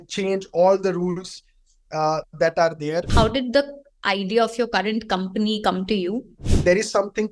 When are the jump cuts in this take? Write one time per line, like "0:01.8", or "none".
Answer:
0:03.1
0:06.4